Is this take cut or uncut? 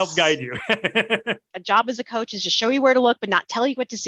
cut